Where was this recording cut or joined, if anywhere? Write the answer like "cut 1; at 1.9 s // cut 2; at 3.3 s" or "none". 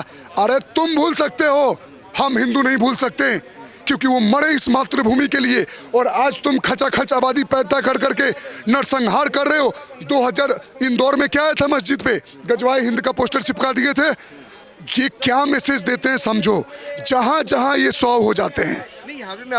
none